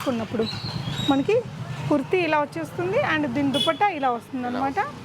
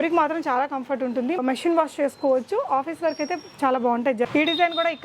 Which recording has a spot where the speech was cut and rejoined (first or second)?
second